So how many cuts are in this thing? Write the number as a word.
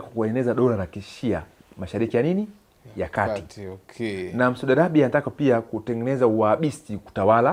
zero